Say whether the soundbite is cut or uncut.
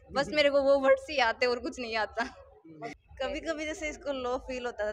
cut